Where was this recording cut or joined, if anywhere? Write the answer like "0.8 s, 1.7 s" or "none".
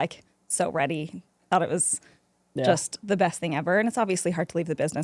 none